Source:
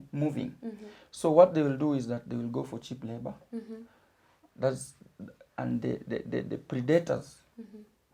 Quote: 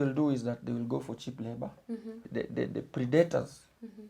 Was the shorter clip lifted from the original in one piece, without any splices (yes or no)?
no